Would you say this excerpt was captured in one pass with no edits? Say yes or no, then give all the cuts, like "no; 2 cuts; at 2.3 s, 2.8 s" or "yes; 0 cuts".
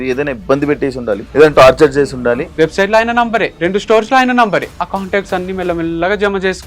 no; 4 cuts; at 1.3 s, 2.4 s, 3.5 s, 4.8 s